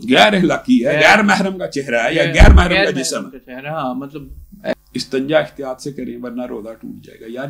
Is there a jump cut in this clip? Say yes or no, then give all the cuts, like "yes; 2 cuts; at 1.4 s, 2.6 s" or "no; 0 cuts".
yes; 1 cut; at 4.7 s